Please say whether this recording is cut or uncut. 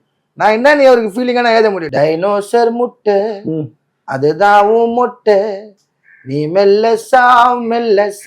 cut